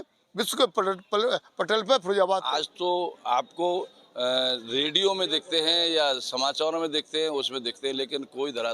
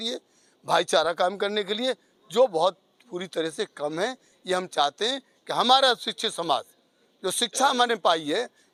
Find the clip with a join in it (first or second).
first